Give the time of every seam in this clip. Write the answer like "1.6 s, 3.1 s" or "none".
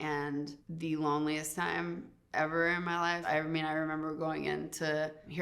3.2 s